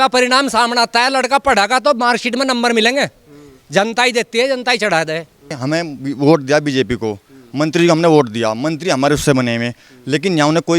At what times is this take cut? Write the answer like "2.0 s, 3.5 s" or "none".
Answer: 5.6 s